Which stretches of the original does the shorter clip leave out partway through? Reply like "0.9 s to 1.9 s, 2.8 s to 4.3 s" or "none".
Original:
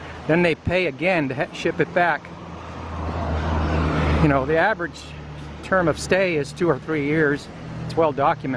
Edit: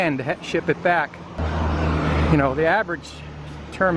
2.5 s to 3.3 s